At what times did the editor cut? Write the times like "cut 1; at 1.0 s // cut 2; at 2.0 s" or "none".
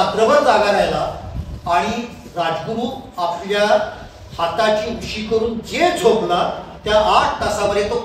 none